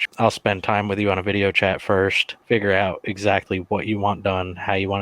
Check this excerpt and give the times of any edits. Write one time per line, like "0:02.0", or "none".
0:02.3